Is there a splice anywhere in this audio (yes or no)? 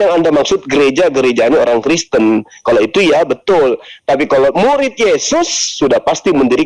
no